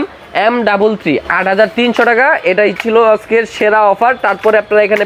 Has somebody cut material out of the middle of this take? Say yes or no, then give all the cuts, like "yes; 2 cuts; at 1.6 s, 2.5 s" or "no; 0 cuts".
no; 0 cuts